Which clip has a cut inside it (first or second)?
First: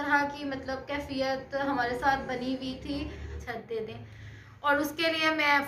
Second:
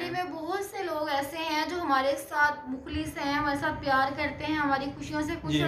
first